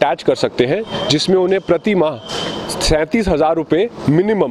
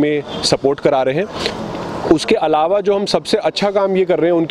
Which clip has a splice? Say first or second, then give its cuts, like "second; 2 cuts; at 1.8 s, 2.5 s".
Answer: second; 1 cut; at 1.5 s